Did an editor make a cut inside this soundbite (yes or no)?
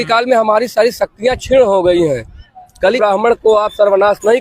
yes